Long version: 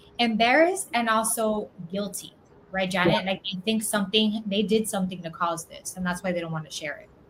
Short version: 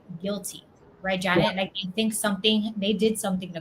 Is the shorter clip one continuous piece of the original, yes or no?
yes